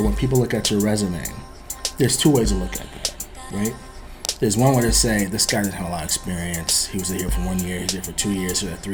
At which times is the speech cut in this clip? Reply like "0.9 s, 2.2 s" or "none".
none